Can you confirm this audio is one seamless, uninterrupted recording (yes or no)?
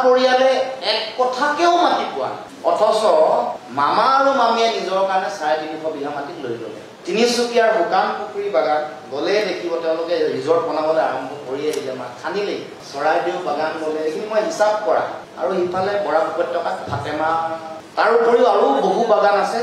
yes